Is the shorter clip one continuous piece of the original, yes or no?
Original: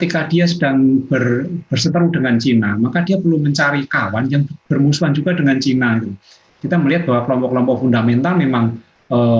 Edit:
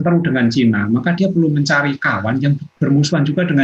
yes